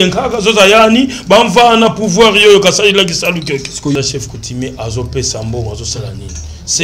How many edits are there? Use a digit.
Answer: 1